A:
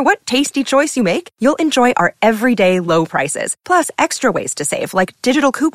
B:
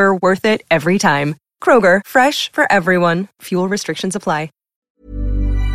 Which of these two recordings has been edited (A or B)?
B